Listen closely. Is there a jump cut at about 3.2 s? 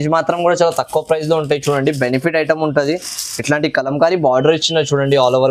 no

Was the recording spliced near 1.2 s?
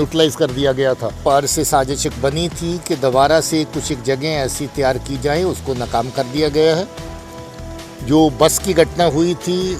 yes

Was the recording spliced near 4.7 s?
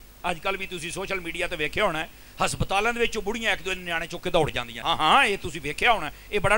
yes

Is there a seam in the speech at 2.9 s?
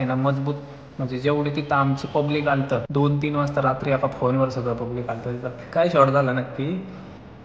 yes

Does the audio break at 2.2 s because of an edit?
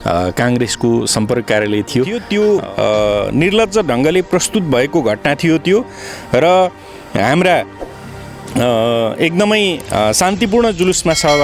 yes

